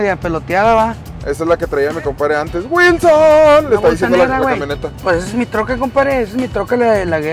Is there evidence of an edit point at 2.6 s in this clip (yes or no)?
no